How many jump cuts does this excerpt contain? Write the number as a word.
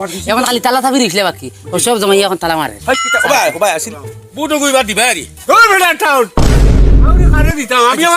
one